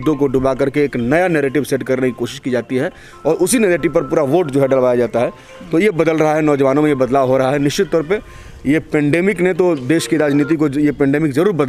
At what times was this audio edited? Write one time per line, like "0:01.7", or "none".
none